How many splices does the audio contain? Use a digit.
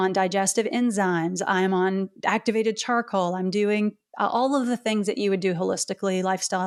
0